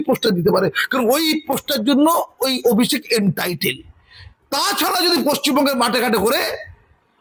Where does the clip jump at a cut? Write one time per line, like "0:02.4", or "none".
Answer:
none

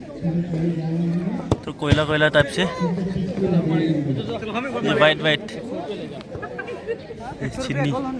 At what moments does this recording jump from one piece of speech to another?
none

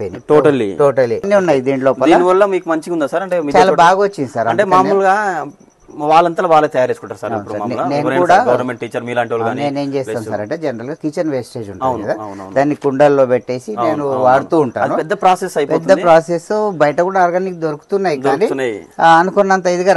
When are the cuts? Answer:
0:01.3

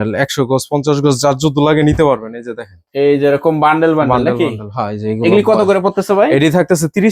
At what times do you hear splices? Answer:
none

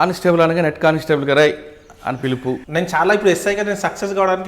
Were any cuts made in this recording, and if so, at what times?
0:02.6

